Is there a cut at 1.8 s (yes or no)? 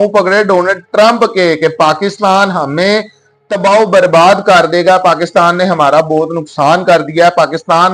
yes